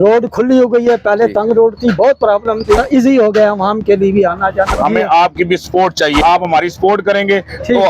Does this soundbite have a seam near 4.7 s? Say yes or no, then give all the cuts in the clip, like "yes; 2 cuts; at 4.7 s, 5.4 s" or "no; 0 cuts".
yes; 3 cuts; at 2.8 s, 4.7 s, 6.2 s